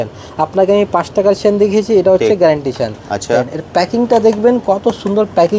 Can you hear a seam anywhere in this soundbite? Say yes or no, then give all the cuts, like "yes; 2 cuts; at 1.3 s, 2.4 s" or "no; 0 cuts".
no; 0 cuts